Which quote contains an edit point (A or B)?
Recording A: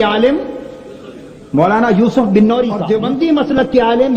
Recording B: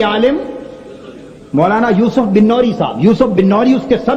A